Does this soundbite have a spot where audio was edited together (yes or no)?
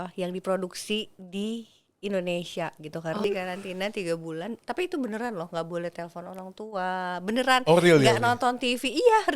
yes